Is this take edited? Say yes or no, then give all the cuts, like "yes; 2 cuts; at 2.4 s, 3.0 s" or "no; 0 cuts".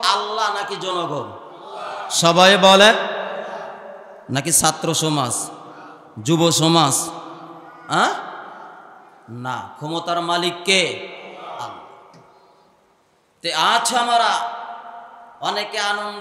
no; 0 cuts